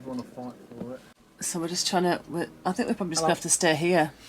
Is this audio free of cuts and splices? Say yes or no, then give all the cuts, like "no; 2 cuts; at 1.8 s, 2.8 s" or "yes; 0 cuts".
yes; 0 cuts